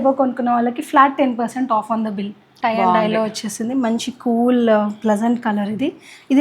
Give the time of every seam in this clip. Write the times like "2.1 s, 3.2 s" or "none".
2.4 s